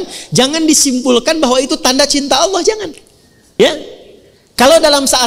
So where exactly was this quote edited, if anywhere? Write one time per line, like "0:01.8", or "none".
0:03.6